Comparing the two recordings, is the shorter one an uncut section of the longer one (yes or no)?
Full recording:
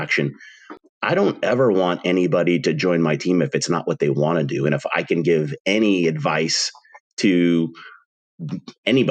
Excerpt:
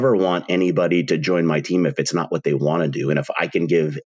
yes